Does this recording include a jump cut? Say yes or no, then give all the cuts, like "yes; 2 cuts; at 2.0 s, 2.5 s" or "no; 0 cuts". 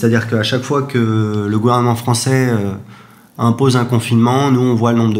no; 0 cuts